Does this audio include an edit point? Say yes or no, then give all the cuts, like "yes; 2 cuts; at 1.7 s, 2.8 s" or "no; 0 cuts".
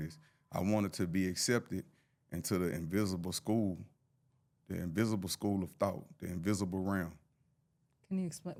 no; 0 cuts